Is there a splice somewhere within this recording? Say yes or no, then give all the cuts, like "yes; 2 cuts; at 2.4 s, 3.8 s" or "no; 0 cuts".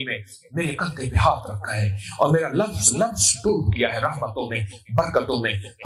no; 0 cuts